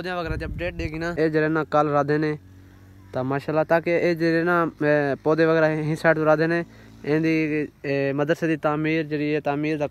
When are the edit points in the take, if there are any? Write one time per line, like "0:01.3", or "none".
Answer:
0:01.1